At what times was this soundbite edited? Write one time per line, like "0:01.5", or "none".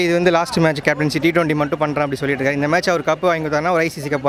none